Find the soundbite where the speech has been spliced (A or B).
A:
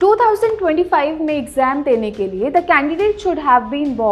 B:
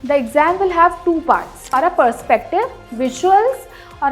B